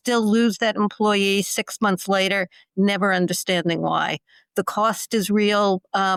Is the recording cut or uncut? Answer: uncut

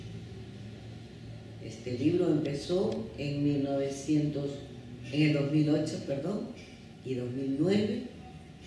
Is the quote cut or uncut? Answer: cut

